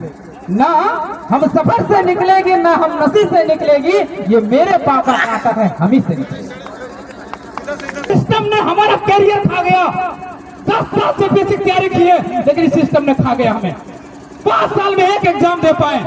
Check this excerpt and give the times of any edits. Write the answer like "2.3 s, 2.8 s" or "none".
8.1 s